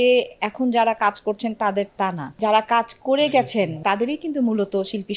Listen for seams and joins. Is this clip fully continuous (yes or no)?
no